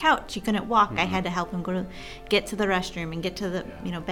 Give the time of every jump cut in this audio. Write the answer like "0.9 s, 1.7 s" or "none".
none